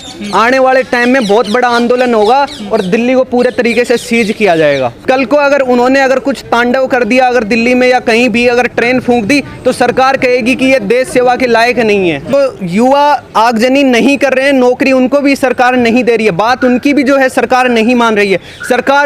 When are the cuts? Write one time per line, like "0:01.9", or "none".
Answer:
0:04.9
0:12.3